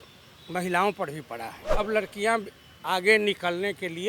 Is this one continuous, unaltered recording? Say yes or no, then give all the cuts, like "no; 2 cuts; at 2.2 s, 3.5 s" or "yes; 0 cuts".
no; 1 cut; at 1.7 s